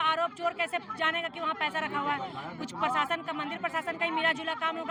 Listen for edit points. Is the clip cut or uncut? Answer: uncut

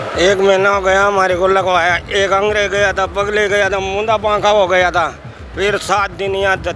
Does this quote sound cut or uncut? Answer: uncut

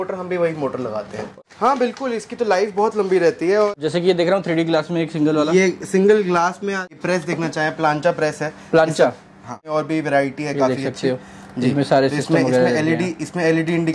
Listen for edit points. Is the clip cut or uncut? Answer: cut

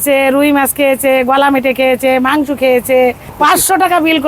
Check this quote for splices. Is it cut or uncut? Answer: cut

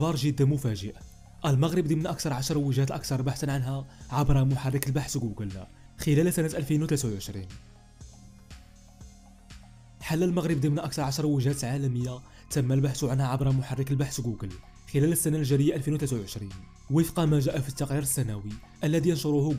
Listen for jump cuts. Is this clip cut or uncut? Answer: uncut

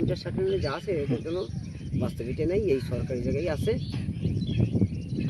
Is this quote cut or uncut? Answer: uncut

